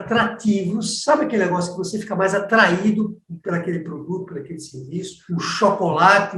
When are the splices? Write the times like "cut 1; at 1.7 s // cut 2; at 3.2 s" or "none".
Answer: cut 1; at 5.2 s

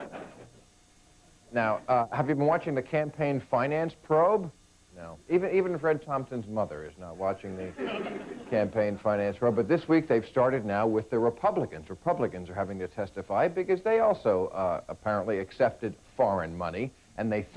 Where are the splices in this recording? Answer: none

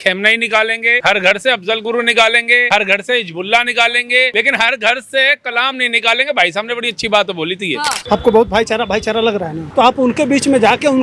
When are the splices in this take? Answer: cut 1; at 1.0 s // cut 2; at 2.6 s // cut 3; at 4.3 s // cut 4; at 8.0 s // cut 5; at 9.6 s

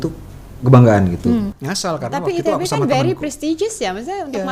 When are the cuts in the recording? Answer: cut 1; at 1.5 s

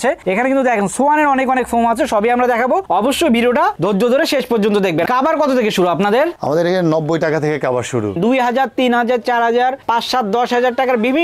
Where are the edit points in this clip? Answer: cut 1; at 5.1 s // cut 2; at 8.1 s

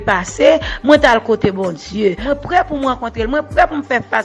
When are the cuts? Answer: cut 1; at 2.2 s

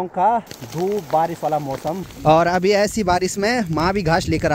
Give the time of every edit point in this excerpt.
cut 1; at 2.1 s

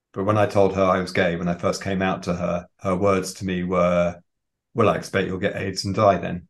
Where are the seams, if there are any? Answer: cut 1; at 2.7 s

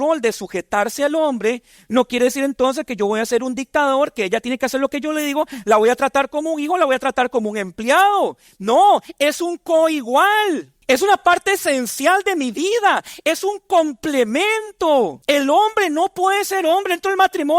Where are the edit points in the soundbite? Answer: cut 1; at 10.7 s // cut 2; at 15.2 s

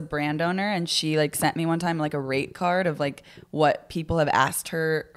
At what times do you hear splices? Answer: none

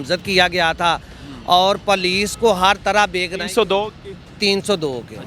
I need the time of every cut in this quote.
none

